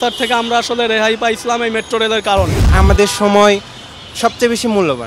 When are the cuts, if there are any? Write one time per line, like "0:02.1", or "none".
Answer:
0:02.6